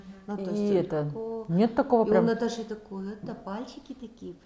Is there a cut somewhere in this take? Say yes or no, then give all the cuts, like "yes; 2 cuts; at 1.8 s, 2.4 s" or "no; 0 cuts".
no; 0 cuts